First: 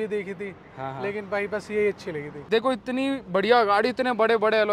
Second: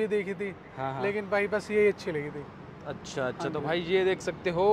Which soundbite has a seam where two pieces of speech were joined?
first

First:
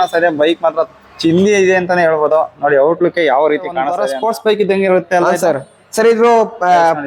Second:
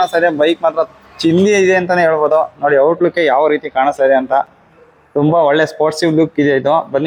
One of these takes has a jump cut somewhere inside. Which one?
first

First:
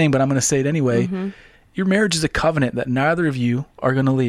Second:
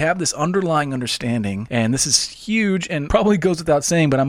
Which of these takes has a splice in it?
second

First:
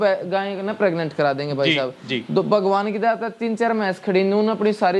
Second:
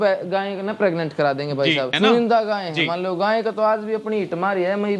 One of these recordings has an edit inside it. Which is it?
second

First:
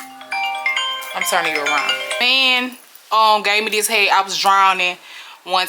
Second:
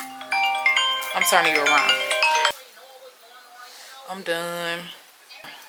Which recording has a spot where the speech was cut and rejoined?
first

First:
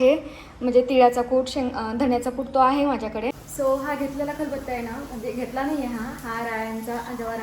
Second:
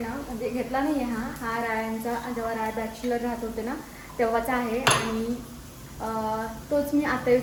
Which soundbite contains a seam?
first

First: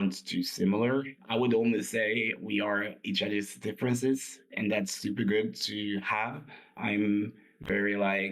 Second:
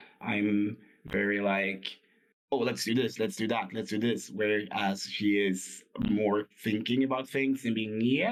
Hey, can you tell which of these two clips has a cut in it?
first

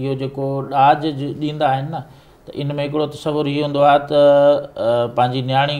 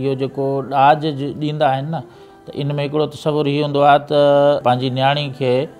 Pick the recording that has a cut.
second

